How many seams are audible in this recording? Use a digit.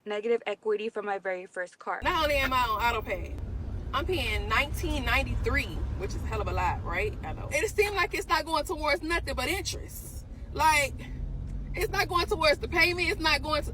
3